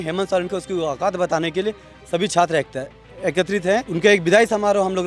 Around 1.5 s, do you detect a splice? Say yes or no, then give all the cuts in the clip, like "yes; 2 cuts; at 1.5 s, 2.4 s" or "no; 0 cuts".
no; 1 cut; at 3.9 s